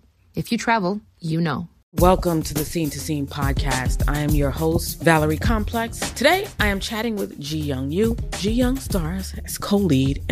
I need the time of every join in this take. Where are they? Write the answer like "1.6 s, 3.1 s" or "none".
1.8 s